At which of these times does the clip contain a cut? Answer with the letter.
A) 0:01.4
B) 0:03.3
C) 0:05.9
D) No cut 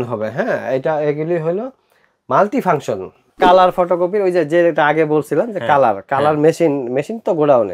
B